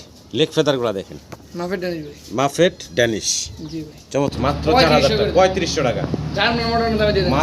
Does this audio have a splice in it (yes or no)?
yes